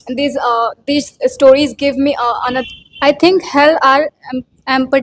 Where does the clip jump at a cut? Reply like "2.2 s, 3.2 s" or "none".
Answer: 2.6 s